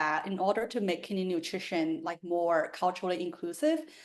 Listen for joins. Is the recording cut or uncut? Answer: uncut